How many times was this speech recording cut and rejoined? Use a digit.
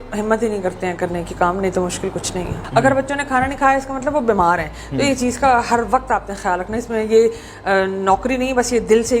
1